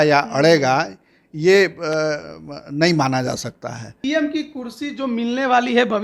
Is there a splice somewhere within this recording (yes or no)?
yes